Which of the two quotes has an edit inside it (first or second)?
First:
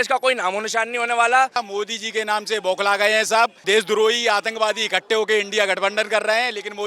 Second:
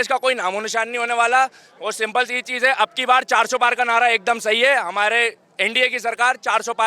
first